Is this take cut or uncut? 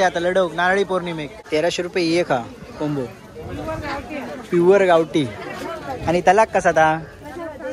cut